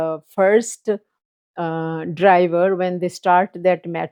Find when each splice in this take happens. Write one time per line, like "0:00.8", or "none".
none